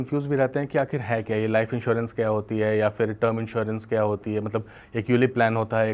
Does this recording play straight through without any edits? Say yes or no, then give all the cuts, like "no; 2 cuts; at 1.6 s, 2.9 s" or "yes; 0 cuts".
yes; 0 cuts